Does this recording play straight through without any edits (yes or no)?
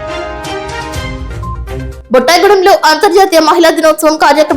no